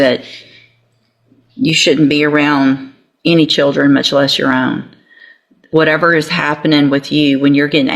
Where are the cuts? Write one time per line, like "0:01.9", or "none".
none